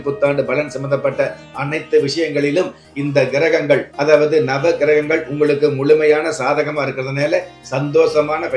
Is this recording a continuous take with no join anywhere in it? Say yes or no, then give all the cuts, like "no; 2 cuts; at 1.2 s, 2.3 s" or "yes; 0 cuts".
yes; 0 cuts